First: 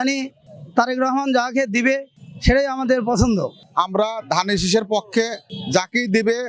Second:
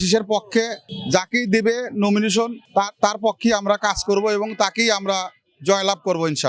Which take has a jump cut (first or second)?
first